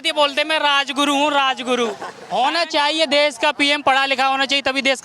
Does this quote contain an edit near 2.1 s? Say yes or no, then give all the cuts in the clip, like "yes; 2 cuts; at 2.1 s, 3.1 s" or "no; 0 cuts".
yes; 1 cut; at 2.1 s